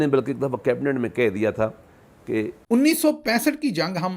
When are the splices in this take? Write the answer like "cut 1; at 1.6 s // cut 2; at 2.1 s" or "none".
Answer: cut 1; at 2.6 s